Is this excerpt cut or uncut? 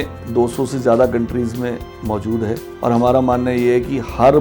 cut